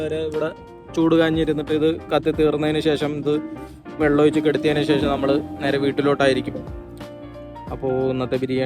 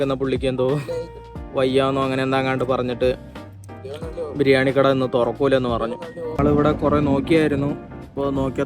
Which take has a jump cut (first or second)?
second